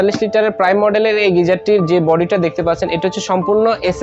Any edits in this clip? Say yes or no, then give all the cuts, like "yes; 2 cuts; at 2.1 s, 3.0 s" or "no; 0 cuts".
no; 0 cuts